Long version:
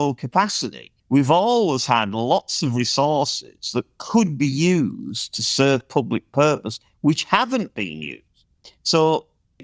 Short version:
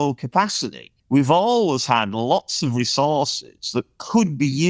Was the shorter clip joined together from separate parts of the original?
no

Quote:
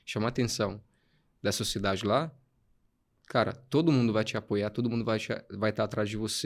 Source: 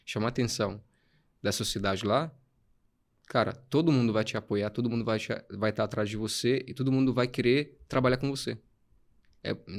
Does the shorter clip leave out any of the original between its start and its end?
no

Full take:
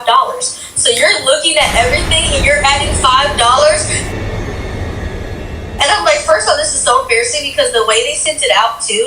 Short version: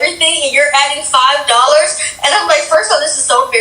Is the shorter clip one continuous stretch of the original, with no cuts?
no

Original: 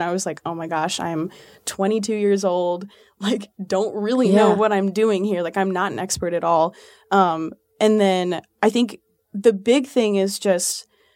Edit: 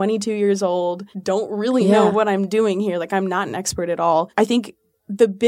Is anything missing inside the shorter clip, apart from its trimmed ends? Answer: yes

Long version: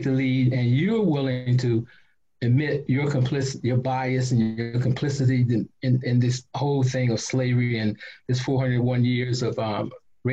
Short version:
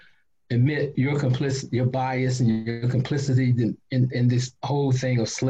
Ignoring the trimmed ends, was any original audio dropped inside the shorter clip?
no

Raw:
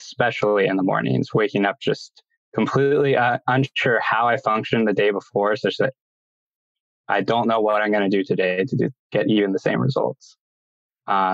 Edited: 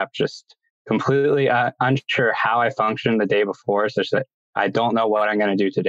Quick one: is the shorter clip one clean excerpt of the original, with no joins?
no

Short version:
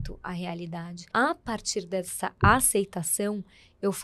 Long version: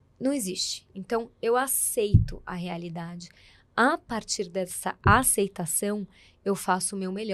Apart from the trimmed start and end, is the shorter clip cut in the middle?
yes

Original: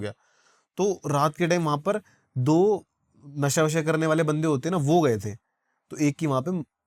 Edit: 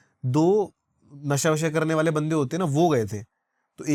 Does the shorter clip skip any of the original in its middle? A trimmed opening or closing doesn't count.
no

